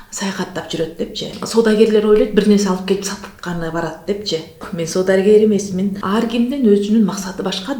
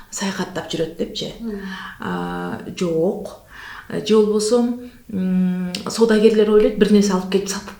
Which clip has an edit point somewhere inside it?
first; 3 cuts; at 1.4 s, 4.7 s, 6.0 s

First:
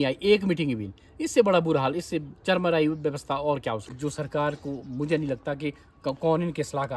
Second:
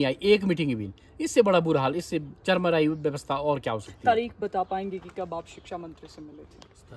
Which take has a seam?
first; 1 cut; at 3.9 s

